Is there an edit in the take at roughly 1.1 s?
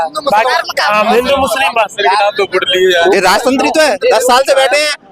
no; 1 cut; at 3.0 s

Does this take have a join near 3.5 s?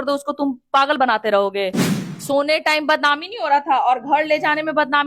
no; 1 cut; at 2.0 s

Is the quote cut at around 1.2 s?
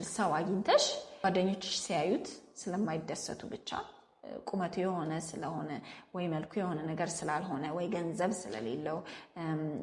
yes; 1 cut; at 1.2 s

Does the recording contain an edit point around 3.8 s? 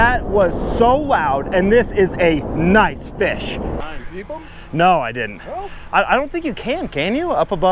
yes; 1 cut; at 3.8 s

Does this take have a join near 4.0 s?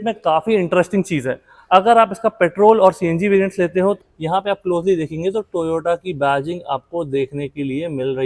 yes; 1 cut; at 4.0 s

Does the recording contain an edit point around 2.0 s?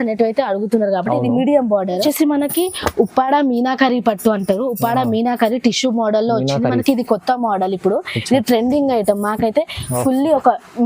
yes; 1 cut; at 2.0 s

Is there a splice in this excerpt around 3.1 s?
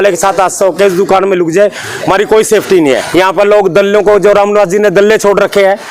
yes; 1 cut; at 3.1 s

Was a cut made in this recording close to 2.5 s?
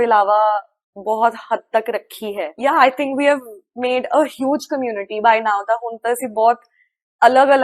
yes; 1 cut; at 2.5 s

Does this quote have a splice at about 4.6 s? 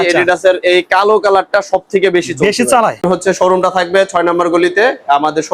no; 1 cut; at 3.0 s

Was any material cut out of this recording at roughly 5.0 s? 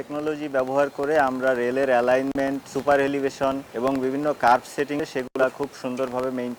yes; 3 cuts; at 2.7 s, 3.7 s, 5.0 s

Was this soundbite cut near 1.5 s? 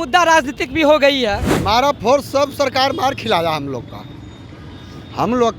yes; 1 cut; at 1.5 s

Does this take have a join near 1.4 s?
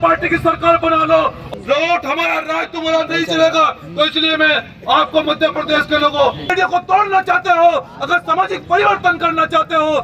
yes; 2 cuts; at 1.4 s, 6.5 s

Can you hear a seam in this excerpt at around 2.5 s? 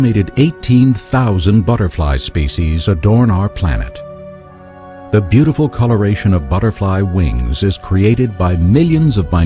yes; 1 cut; at 2.5 s

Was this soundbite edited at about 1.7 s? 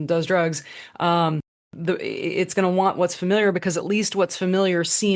yes; 1 cut; at 1.7 s

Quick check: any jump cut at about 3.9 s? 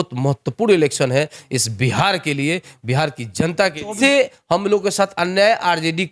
yes; 1 cut; at 3.9 s

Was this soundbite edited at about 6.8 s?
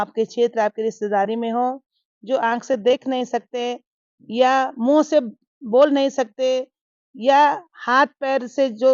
no; 0 cuts

